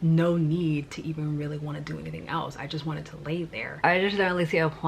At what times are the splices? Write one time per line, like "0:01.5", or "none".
0:03.8